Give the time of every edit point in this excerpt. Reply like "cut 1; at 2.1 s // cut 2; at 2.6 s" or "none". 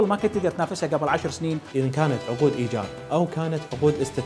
cut 1; at 1.7 s